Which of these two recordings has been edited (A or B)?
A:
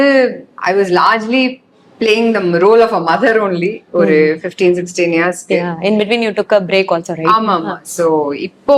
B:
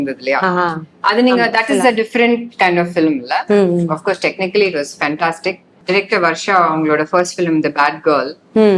B